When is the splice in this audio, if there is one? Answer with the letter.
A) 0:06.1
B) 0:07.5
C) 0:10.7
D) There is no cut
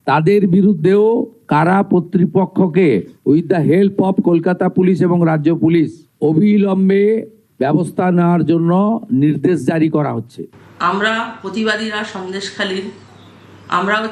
C